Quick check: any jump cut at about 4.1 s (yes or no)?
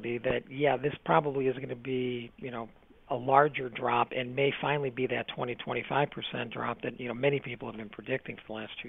no